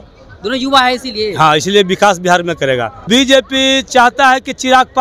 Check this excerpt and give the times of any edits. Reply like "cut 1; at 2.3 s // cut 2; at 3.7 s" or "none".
cut 1; at 3.0 s